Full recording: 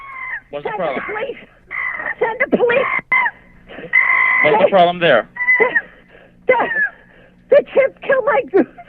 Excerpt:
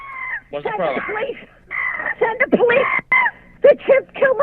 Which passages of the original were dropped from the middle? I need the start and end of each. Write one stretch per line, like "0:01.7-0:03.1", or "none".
0:03.4-0:07.3